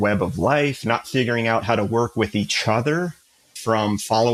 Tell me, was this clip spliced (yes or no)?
no